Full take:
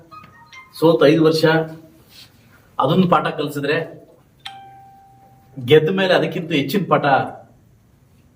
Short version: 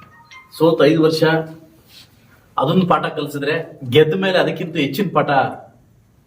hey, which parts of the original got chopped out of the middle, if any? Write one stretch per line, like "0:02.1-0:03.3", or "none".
0:04.0-0:05.5